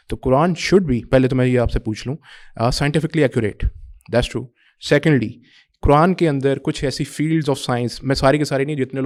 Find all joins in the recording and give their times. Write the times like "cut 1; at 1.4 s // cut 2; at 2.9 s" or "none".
none